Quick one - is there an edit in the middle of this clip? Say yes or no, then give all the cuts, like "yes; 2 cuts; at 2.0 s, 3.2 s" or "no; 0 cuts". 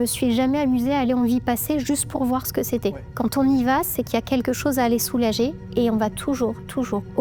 no; 0 cuts